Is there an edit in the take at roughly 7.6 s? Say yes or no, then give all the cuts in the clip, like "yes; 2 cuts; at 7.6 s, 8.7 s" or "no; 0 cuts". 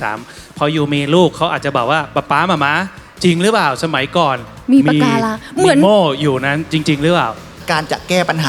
yes; 1 cut; at 7.6 s